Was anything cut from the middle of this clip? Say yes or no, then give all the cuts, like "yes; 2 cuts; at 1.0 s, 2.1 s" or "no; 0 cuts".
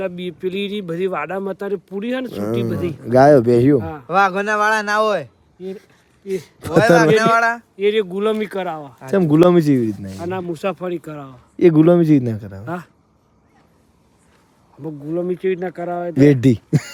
no; 0 cuts